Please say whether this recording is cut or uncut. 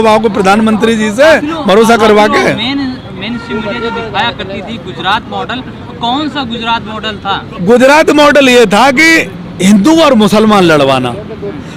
uncut